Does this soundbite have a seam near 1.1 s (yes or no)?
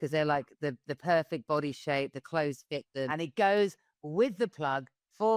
no